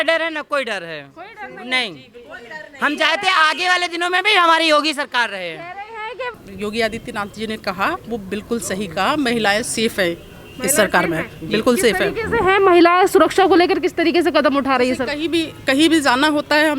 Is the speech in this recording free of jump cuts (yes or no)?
no